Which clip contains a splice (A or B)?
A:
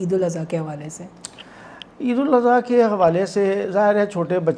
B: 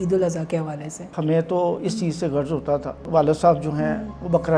B